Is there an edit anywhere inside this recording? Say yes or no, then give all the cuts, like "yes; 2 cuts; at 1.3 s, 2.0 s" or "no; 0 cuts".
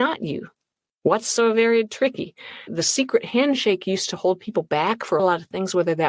yes; 2 cuts; at 2.7 s, 5.2 s